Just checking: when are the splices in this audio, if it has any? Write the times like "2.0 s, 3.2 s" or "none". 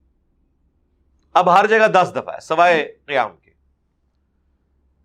none